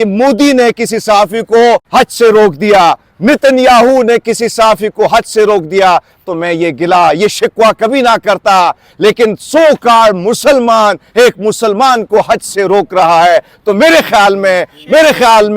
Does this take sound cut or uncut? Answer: cut